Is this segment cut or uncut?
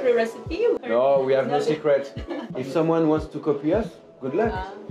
cut